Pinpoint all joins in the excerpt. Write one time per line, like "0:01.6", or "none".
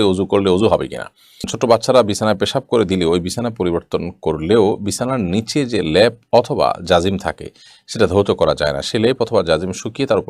0:01.5